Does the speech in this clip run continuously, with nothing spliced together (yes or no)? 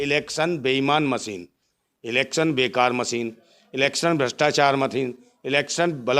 yes